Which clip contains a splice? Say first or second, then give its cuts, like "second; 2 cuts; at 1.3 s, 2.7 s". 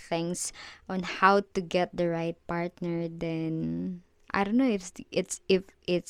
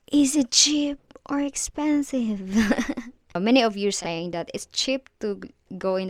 second; 1 cut; at 3.4 s